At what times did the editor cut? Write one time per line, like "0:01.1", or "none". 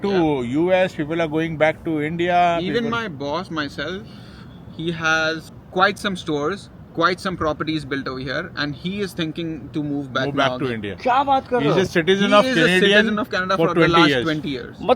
none